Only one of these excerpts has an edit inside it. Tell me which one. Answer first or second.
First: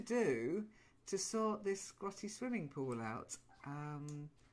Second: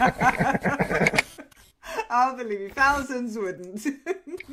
first